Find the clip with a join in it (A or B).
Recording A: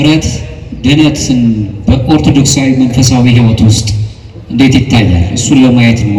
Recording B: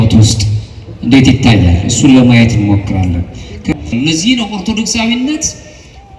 B